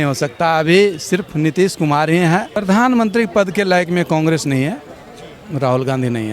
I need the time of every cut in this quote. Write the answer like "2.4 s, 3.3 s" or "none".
2.5 s